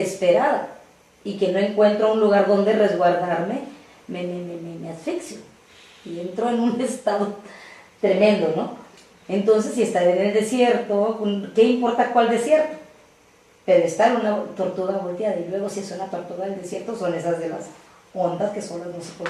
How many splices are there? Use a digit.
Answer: 1